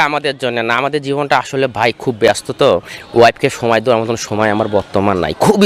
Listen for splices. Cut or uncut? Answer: uncut